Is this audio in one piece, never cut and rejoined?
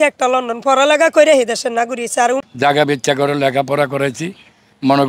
no; 1 cut; at 2.4 s

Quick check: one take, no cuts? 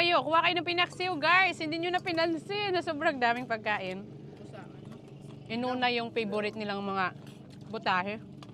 yes; 0 cuts

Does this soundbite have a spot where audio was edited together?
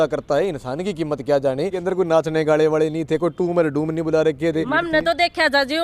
yes; 2 cuts; at 1.8 s, 4.7 s

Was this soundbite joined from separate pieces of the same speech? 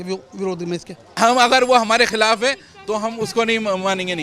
yes; 1 cut; at 1.1 s

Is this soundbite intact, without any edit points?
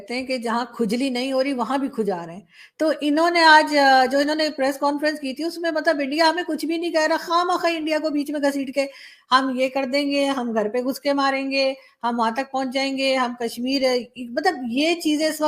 yes; 0 cuts

